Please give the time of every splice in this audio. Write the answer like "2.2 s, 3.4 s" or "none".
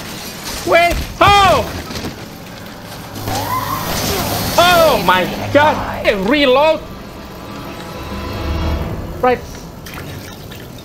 6.0 s